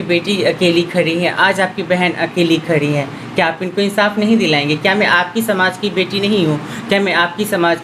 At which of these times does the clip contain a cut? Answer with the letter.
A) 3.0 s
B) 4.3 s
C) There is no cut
C